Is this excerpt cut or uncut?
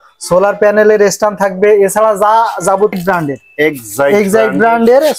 cut